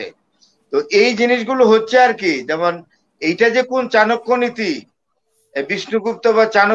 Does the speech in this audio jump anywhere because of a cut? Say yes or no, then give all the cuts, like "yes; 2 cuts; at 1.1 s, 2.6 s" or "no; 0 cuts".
no; 0 cuts